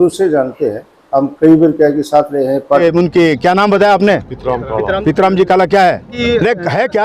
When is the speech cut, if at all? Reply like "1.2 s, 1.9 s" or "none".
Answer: 2.8 s, 6.1 s